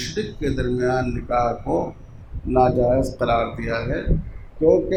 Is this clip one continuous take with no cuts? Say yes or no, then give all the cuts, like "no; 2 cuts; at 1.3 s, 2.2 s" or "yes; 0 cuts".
yes; 0 cuts